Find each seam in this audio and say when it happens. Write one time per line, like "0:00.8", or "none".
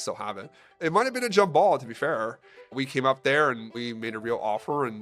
0:00.8
0:02.8
0:03.8